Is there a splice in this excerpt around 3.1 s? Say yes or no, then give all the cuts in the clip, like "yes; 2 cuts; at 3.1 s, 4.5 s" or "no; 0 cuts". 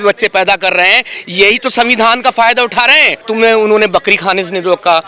yes; 1 cut; at 3.1 s